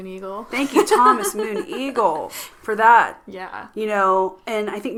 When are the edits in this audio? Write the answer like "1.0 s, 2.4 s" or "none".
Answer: none